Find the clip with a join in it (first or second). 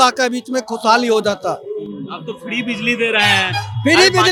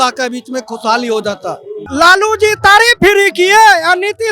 second